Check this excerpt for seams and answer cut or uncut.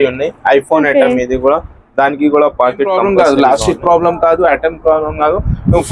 cut